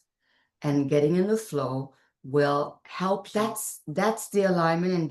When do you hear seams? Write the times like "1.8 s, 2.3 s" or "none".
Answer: 3.2 s